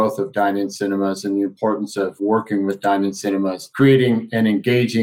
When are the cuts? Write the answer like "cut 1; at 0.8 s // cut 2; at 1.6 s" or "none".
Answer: cut 1; at 2.2 s // cut 2; at 3.6 s